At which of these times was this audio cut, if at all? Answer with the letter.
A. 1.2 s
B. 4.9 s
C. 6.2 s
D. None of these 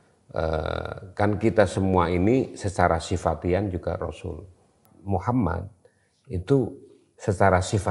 D